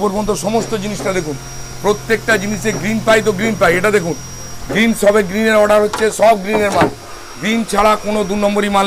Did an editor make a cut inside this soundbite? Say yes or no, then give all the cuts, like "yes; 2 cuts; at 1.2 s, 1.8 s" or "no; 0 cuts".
no; 0 cuts